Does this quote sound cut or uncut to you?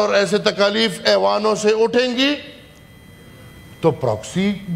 uncut